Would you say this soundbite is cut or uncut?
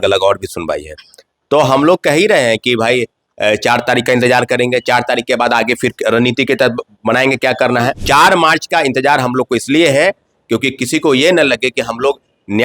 cut